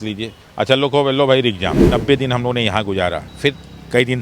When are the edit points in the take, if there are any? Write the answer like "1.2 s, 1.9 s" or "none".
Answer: 1.8 s, 3.3 s